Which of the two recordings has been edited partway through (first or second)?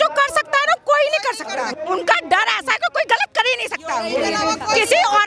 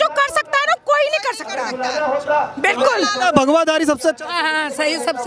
first